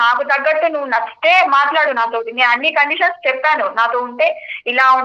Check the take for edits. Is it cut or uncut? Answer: uncut